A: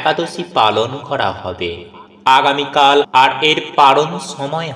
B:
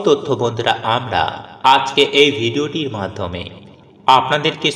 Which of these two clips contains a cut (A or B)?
A